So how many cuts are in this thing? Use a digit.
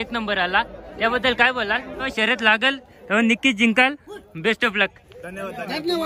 1